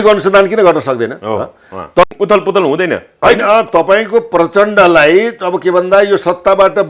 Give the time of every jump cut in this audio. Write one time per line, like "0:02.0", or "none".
0:02.1

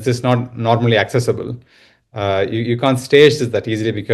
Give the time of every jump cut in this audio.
none

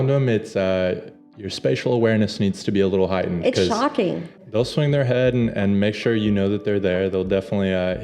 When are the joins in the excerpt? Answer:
0:04.4

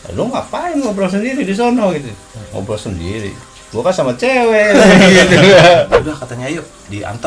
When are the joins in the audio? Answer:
0:06.0

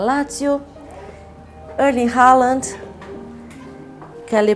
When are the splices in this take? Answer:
none

